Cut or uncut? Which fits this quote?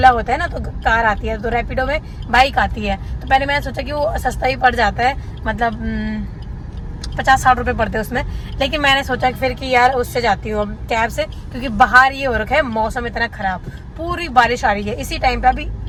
uncut